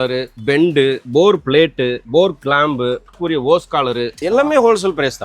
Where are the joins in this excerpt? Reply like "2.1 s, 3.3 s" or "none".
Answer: 1.0 s, 2.0 s, 3.2 s, 4.2 s